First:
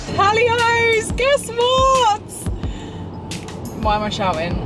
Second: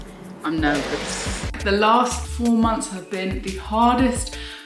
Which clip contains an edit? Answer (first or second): second